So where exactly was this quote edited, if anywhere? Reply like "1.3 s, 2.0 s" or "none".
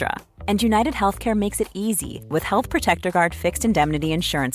none